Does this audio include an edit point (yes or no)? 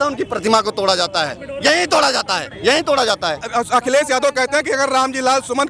no